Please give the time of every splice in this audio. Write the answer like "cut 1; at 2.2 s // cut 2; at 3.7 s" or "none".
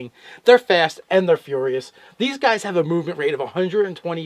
none